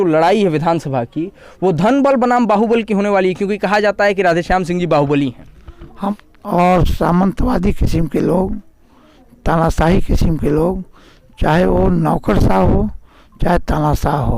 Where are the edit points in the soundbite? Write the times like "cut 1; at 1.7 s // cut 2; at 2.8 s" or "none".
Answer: cut 1; at 6.1 s